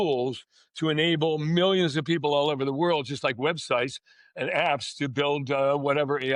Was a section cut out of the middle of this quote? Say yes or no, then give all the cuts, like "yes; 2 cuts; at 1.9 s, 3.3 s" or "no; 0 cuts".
no; 0 cuts